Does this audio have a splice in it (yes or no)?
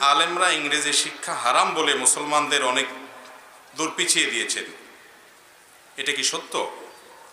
no